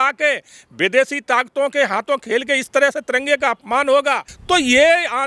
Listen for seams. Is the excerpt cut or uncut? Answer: cut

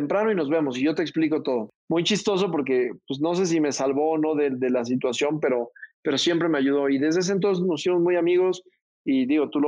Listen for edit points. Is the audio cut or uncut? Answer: cut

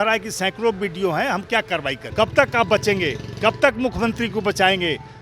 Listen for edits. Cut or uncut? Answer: cut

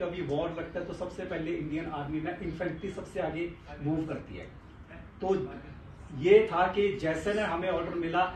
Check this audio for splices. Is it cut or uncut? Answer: uncut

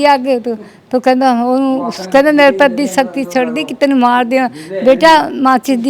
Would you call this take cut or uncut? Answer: uncut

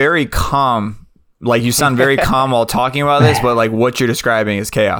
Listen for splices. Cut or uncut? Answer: uncut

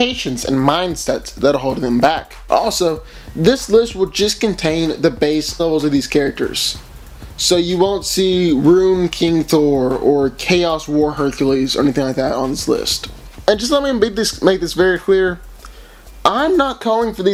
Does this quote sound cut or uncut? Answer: uncut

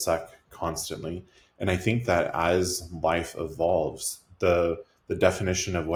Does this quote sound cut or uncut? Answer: uncut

